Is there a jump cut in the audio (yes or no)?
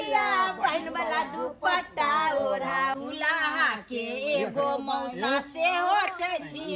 yes